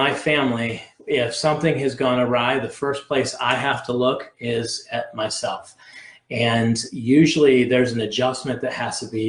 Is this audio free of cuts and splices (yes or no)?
yes